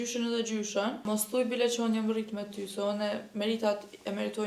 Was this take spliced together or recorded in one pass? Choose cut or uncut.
cut